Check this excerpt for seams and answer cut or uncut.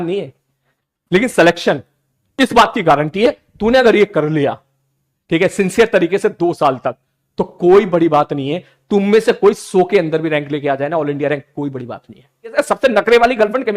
cut